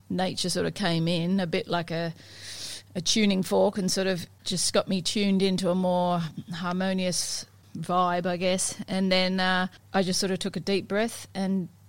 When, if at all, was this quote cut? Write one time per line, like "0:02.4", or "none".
0:04.3
0:07.6
0:09.8